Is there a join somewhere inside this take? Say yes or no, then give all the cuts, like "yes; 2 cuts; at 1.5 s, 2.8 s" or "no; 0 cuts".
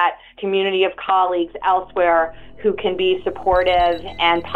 no; 0 cuts